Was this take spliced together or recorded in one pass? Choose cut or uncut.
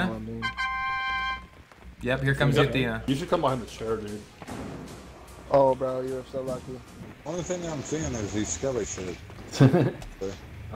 cut